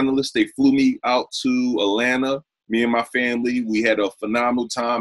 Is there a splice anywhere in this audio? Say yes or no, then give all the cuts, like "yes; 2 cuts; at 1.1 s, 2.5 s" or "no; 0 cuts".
no; 0 cuts